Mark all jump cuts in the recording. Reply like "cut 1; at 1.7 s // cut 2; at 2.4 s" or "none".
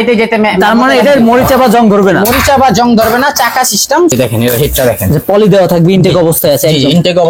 cut 1; at 4.1 s